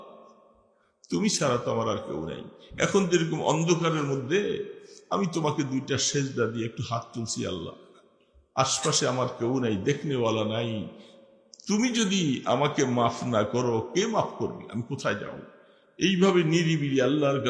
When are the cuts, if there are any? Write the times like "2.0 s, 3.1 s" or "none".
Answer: none